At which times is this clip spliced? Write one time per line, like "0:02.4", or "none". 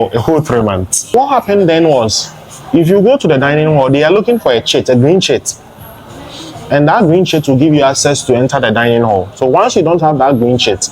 0:01.1